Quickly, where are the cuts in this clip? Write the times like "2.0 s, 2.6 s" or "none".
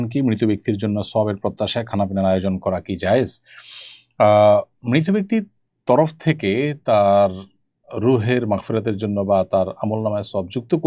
none